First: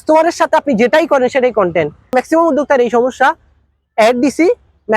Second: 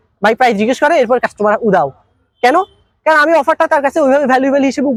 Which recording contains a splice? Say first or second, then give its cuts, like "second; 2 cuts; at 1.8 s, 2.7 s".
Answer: first; 1 cut; at 2.1 s